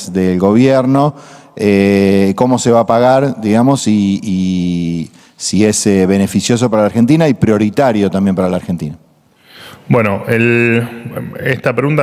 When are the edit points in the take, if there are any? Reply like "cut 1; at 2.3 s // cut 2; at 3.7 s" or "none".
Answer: none